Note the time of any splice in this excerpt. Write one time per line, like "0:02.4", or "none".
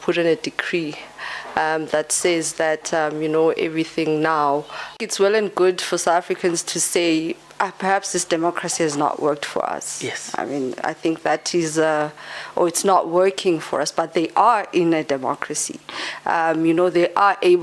0:05.0